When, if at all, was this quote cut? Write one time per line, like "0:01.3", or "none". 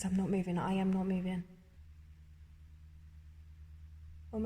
0:01.8